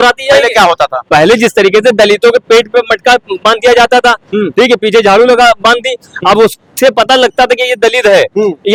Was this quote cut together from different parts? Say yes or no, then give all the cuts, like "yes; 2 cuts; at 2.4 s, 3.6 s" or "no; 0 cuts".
no; 0 cuts